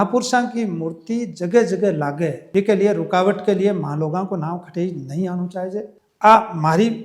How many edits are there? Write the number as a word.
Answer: one